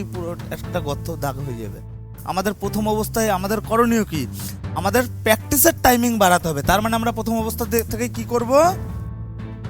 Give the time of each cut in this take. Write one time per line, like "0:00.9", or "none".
0:08.8